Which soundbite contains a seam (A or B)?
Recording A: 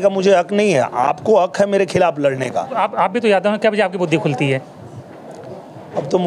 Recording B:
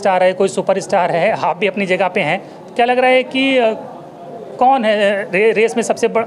A